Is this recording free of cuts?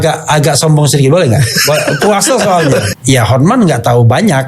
no; 1 cut; at 2.9 s

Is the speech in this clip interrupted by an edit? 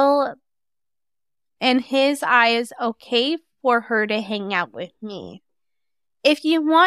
yes; 1 cut; at 5.5 s

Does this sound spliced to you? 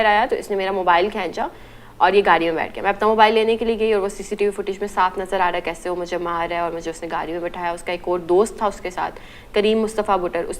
no; 0 cuts

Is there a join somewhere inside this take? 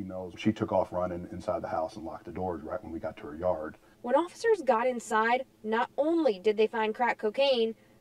no; 0 cuts

